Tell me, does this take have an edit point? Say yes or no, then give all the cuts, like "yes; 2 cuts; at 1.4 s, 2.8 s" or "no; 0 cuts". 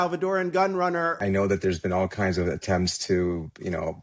yes; 1 cut; at 1.2 s